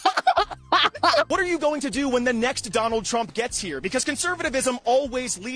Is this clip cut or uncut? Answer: cut